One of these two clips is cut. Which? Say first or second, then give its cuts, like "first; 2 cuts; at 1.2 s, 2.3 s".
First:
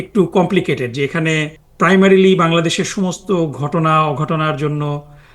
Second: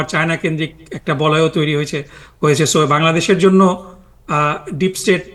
first; 1 cut; at 1.6 s